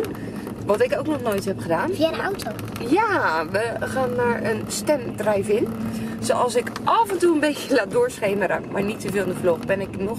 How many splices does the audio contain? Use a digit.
0